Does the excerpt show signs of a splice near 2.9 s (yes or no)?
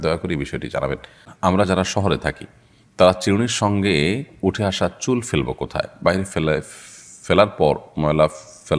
no